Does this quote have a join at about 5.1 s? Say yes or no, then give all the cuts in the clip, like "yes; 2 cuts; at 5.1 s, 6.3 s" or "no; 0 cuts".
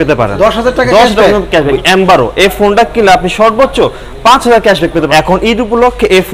yes; 2 cuts; at 1.7 s, 5.1 s